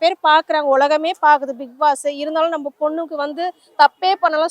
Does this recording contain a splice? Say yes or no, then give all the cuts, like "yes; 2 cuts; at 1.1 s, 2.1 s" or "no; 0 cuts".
no; 0 cuts